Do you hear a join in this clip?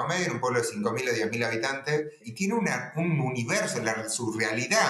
yes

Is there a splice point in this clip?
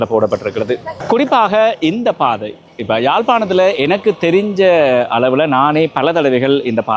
yes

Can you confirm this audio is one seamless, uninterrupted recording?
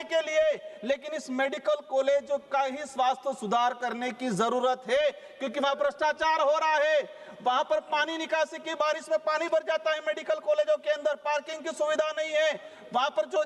yes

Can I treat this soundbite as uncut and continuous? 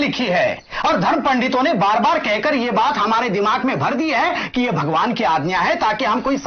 yes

